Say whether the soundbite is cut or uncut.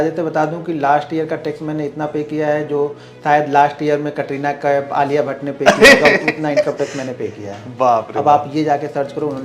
uncut